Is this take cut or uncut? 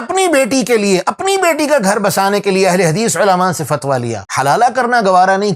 uncut